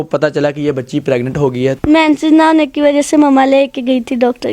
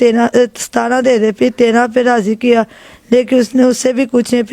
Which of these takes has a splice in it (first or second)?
first